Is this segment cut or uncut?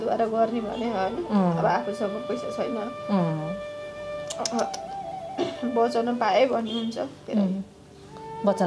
uncut